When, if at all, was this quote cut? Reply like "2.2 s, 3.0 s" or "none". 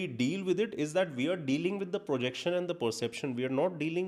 none

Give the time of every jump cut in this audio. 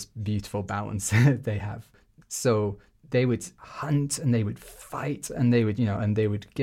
2.0 s, 3.6 s

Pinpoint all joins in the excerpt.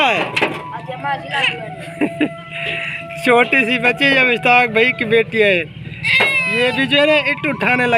none

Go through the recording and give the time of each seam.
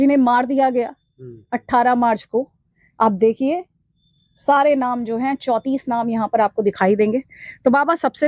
none

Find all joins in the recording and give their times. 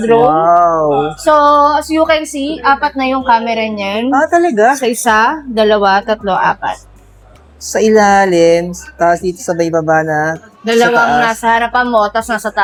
none

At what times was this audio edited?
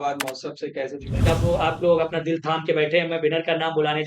1.2 s

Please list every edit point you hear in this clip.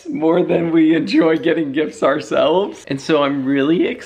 2.8 s

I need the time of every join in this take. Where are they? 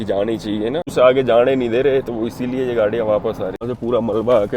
0.9 s, 3.6 s

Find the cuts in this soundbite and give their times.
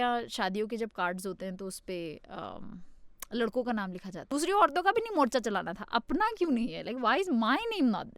4.3 s

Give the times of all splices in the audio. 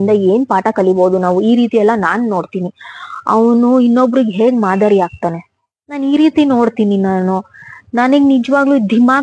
none

